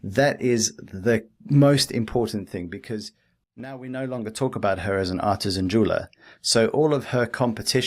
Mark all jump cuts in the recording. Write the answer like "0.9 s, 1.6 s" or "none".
3.8 s